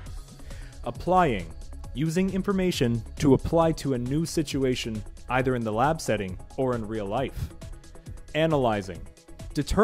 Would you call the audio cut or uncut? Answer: uncut